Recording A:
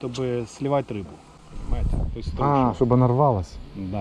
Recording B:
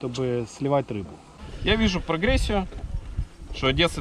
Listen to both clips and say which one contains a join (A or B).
B